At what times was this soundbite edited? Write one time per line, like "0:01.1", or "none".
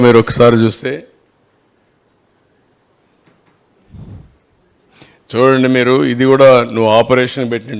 none